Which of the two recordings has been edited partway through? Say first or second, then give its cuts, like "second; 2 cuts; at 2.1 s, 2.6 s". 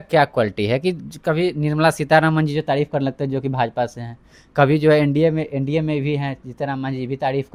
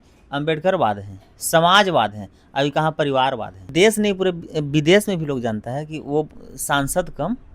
second; 1 cut; at 3.7 s